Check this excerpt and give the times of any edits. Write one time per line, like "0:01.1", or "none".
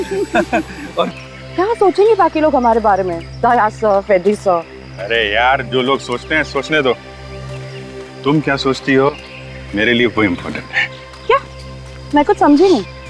0:01.1